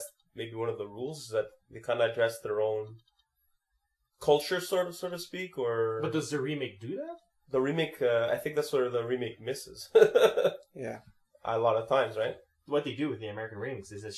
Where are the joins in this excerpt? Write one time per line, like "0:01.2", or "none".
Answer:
none